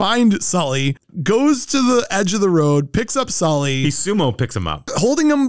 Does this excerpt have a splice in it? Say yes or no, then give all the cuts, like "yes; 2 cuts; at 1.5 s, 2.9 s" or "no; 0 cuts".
yes; 1 cut; at 1.1 s